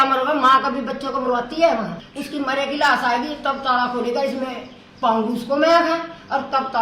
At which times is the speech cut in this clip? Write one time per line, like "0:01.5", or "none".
0:02.0